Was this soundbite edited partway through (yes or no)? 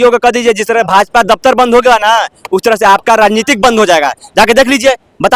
no